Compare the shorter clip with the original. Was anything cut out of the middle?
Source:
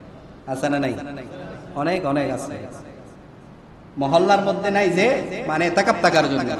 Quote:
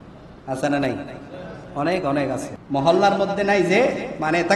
yes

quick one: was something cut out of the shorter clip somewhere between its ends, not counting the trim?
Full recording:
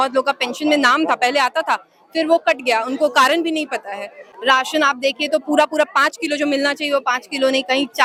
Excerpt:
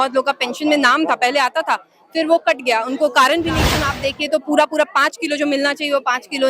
yes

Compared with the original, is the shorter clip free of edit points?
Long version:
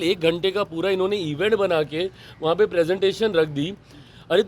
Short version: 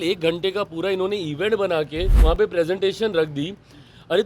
no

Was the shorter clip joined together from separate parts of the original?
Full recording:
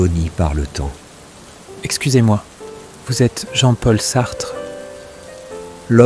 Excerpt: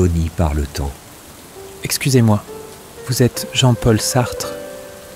yes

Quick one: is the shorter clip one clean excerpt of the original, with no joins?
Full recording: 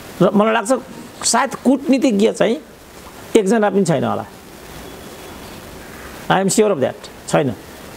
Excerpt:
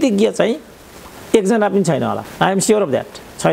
no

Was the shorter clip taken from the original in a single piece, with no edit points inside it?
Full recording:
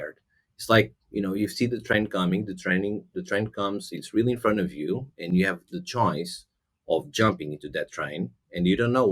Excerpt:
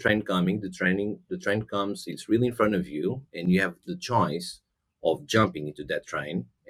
yes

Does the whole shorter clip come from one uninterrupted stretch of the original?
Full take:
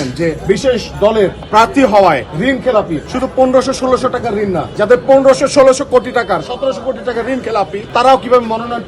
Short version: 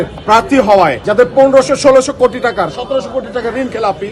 no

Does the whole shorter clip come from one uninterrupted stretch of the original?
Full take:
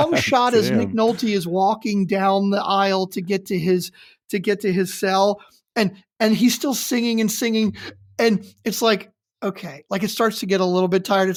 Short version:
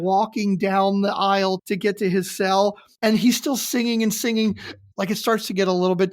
no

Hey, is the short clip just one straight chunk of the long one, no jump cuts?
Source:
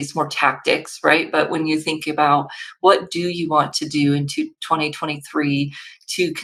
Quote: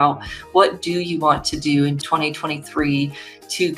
no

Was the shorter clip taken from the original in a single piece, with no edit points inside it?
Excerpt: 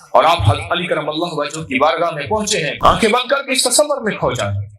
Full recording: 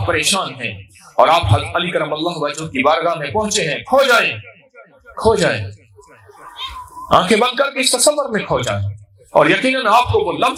no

